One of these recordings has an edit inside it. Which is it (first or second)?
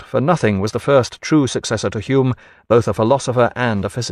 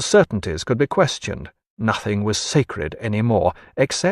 first